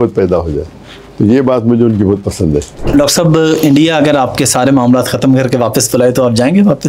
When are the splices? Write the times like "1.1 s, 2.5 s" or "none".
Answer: 2.8 s